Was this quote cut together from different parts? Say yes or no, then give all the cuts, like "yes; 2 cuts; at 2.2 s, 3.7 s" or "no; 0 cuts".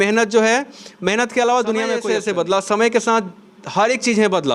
yes; 1 cut; at 2.0 s